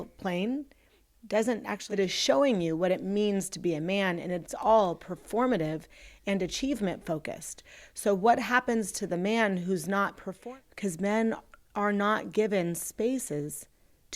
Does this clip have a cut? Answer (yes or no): yes